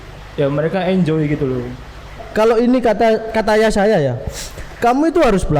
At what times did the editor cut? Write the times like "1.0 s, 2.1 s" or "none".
2.2 s